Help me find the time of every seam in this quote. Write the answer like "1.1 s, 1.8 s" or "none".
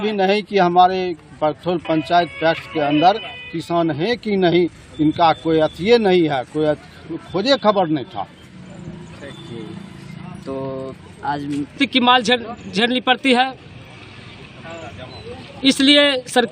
11.7 s